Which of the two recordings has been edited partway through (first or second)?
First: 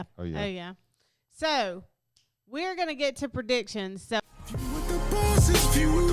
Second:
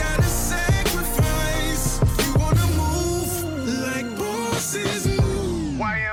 first